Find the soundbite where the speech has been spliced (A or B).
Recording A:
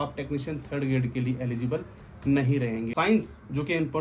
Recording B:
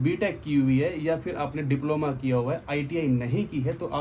A